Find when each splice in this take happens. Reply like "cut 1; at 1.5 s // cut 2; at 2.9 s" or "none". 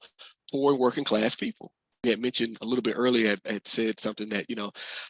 cut 1; at 2.0 s